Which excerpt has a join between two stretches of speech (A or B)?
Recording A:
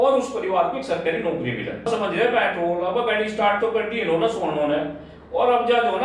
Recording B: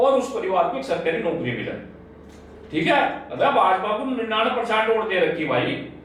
A